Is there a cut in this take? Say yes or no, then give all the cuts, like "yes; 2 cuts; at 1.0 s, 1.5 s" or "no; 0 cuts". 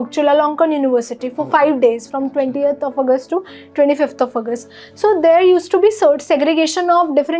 no; 0 cuts